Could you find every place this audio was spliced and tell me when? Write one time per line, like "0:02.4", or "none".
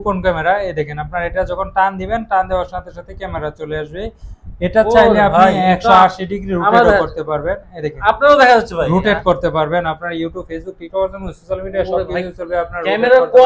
none